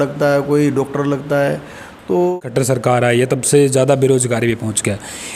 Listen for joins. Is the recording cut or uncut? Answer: cut